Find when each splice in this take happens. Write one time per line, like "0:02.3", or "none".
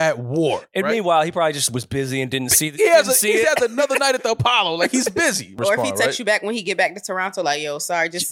0:05.5

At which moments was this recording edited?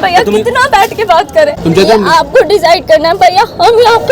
0:01.6

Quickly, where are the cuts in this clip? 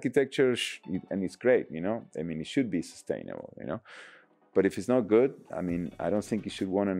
none

